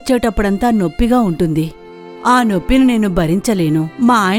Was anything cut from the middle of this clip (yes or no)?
no